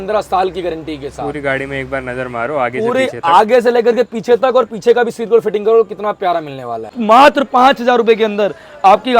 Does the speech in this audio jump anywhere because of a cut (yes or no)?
yes